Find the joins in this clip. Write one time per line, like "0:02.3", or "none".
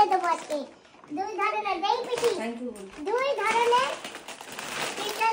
none

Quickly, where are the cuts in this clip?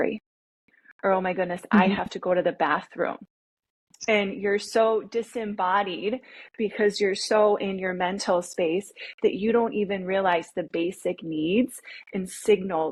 none

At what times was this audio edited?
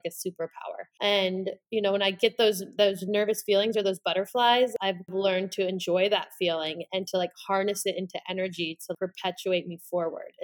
0:00.9
0:05.0
0:08.9

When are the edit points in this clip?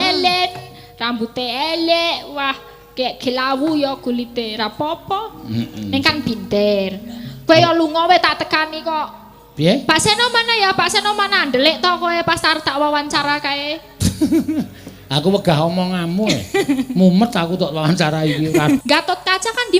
0:18.8

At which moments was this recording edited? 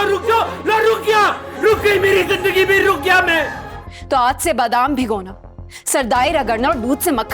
0:03.6

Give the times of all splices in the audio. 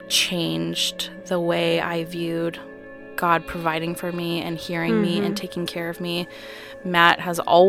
none

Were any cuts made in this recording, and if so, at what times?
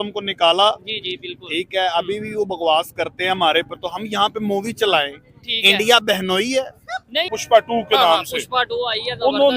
0:07.3

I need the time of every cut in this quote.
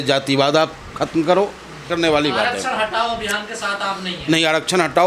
0:01.9

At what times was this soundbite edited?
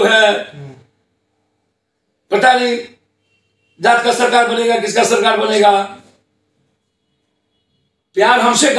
none

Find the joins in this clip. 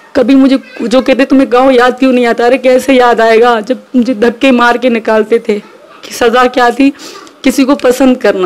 none

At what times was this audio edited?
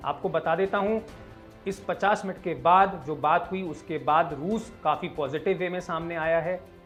none

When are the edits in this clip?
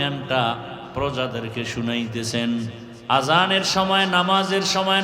0:02.9

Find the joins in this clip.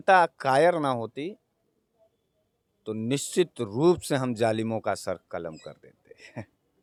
none

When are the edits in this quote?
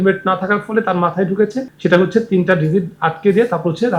0:01.7

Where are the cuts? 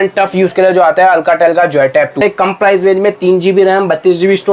0:02.2

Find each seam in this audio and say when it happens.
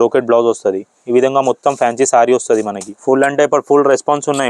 0:02.8

